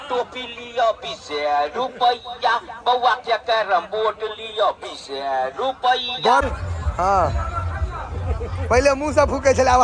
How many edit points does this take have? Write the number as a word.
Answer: one